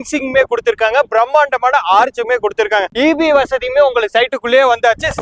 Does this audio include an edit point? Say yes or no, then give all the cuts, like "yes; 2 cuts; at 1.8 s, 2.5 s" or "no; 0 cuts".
no; 0 cuts